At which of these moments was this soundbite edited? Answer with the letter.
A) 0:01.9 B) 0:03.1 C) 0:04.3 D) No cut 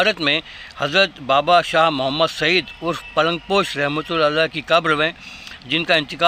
D